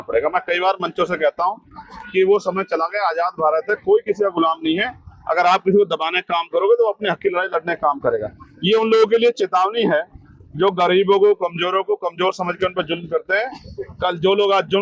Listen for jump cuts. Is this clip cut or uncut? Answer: uncut